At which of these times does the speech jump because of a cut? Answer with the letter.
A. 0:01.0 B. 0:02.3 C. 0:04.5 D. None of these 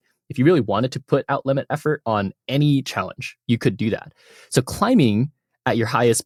D